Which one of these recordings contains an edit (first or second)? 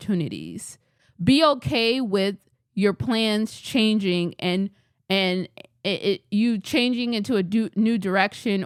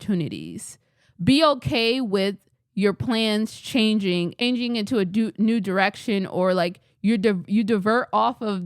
second